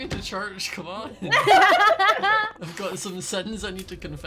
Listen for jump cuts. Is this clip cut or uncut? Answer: uncut